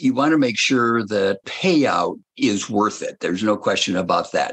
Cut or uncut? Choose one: cut